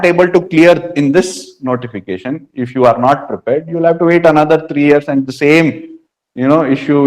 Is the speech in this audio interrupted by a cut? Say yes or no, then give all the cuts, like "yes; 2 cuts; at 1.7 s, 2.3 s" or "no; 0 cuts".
no; 0 cuts